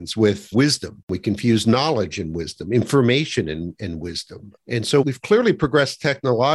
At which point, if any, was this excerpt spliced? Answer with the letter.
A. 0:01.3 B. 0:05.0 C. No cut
B